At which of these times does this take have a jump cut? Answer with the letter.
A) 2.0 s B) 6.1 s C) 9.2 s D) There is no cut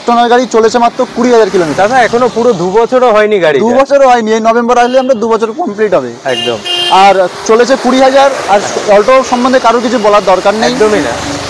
D